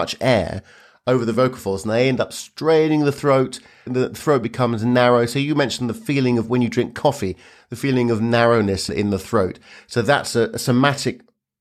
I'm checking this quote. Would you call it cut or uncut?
cut